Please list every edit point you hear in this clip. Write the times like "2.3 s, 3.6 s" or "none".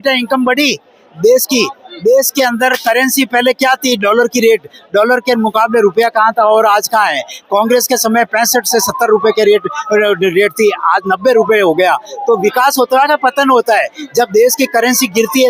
none